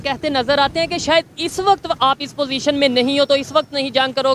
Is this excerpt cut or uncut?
uncut